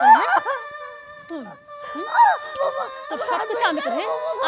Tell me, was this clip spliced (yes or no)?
yes